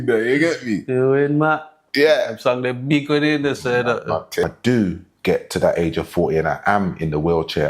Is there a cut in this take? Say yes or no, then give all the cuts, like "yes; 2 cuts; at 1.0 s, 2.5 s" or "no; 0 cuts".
yes; 1 cut; at 4.4 s